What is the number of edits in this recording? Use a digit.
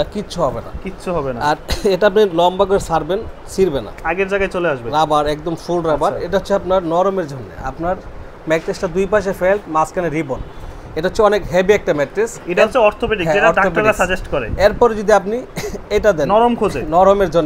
0